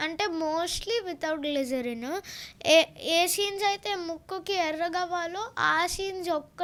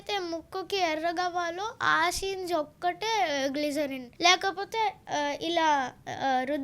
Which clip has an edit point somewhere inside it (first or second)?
second